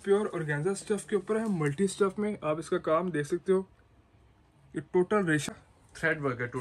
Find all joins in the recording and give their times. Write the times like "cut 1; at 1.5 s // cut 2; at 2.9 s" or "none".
cut 1; at 5.5 s